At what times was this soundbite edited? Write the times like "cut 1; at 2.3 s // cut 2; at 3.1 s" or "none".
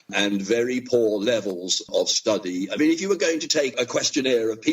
cut 1; at 1.8 s // cut 2; at 3.7 s